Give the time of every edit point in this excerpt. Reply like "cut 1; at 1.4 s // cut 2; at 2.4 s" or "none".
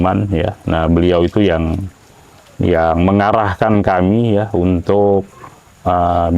none